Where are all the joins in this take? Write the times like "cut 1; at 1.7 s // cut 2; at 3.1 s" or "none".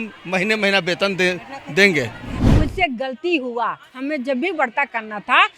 cut 1; at 2.3 s